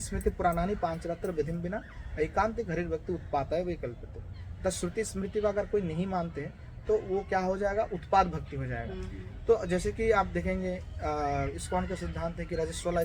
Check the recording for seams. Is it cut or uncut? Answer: uncut